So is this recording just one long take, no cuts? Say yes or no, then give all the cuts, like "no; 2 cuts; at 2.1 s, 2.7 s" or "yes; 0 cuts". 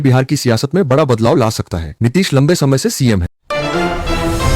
no; 1 cut; at 3.3 s